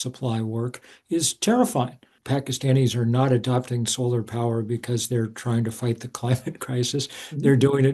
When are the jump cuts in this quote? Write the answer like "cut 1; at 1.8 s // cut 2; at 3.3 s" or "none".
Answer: cut 1; at 2.1 s